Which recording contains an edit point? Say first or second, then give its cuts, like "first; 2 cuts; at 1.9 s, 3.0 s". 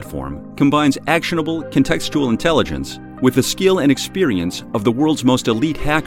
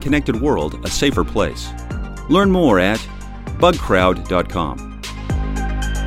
second; 1 cut; at 5.0 s